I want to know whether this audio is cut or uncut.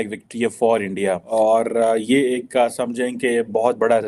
cut